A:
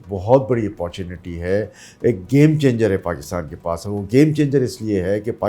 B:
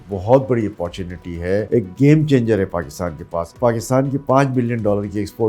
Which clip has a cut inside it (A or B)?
B